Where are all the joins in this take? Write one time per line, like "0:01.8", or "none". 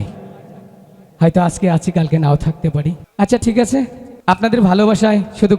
0:03.0
0:04.1